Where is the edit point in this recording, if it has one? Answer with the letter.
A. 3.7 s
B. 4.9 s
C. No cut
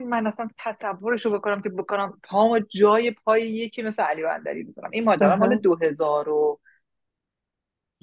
C